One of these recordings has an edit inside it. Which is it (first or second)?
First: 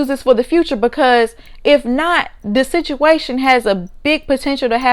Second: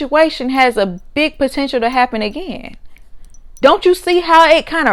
second